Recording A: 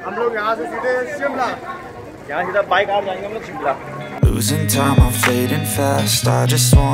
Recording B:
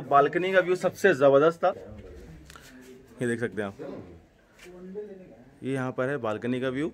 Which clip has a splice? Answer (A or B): A